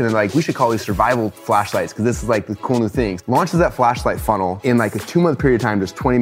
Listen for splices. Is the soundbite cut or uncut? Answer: cut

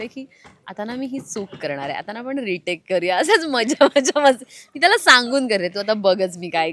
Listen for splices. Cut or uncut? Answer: uncut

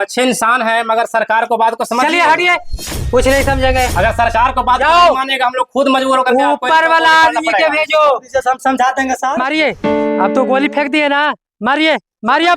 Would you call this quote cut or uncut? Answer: cut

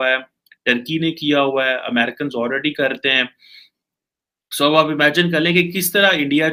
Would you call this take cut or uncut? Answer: uncut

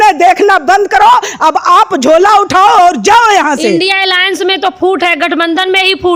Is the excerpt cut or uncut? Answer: uncut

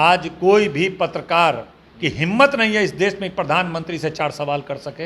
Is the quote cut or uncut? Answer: uncut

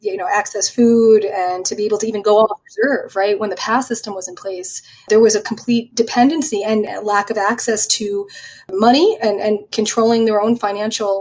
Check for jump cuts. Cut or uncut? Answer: uncut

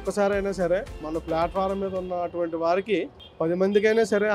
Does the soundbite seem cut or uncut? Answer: cut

